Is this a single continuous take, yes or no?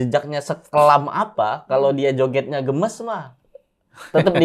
yes